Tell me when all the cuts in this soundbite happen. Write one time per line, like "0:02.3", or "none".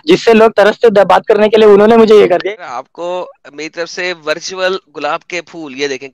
0:02.4